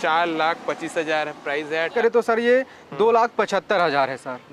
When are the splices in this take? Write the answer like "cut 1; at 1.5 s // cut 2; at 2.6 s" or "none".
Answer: cut 1; at 1.9 s